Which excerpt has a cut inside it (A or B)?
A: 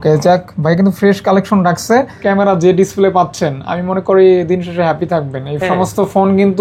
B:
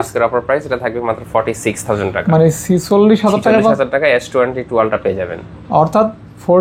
A